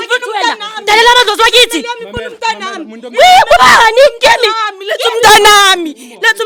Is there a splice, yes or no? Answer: no